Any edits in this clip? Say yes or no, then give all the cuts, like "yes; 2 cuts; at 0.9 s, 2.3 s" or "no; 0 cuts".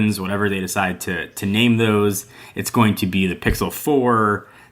no; 0 cuts